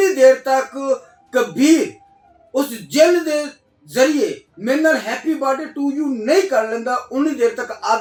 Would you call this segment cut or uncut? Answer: uncut